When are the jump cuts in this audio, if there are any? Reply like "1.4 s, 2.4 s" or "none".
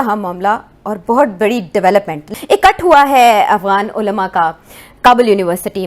2.2 s